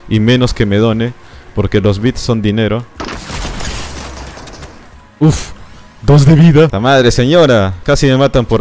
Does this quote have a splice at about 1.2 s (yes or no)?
no